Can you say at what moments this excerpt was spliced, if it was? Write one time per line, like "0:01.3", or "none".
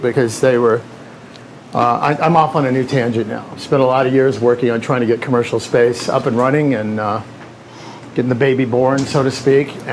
none